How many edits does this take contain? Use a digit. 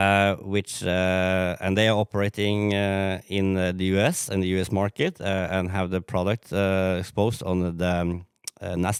0